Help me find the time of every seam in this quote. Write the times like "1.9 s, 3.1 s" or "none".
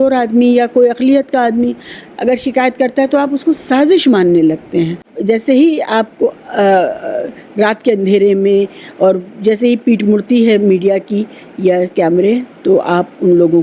5.1 s